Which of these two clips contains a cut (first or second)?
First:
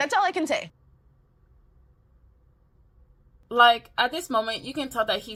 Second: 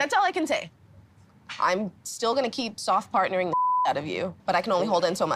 second